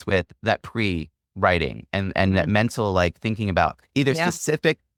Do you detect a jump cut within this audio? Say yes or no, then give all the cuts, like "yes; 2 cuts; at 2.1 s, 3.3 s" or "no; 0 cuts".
no; 0 cuts